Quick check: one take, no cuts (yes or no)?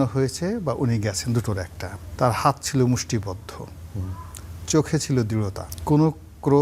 no